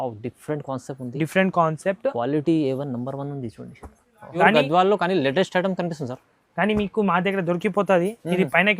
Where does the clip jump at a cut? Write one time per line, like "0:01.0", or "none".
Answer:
0:04.4